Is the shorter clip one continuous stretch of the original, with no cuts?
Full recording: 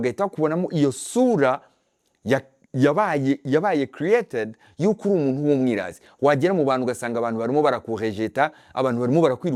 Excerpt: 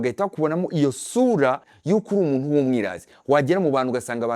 no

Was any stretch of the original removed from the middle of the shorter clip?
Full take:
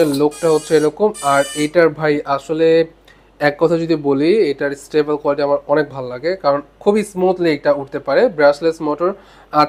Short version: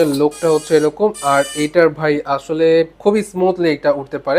yes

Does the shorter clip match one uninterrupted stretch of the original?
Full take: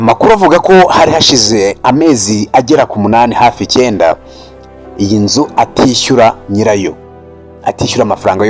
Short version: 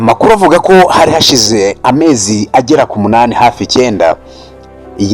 yes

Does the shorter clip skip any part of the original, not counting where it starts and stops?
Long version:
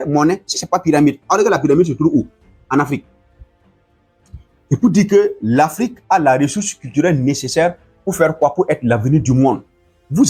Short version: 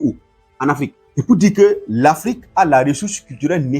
yes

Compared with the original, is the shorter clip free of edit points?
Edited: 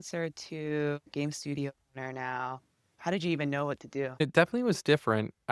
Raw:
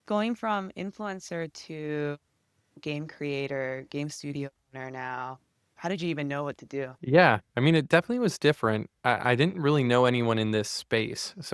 no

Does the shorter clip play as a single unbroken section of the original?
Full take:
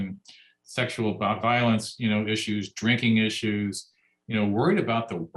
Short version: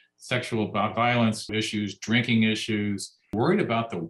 no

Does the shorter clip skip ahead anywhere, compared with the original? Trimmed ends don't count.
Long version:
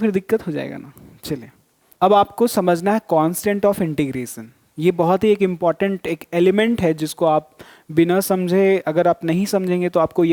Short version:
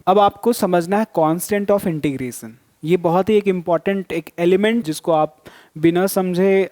yes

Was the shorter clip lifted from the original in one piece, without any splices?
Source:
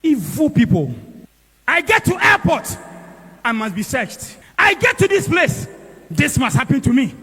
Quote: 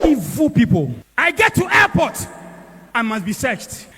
no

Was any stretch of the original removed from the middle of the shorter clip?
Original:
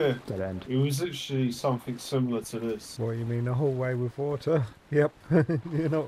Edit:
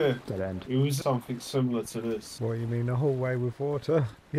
yes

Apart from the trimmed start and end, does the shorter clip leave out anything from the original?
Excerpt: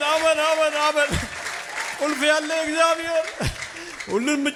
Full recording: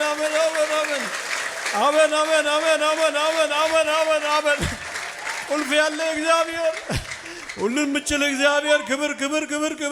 no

